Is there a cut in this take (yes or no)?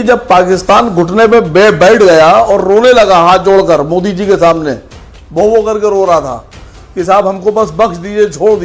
no